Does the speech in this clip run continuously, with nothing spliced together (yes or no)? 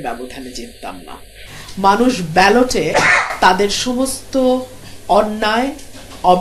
yes